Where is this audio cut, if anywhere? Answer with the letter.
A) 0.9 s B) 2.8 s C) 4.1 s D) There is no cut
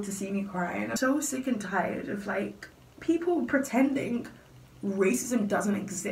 A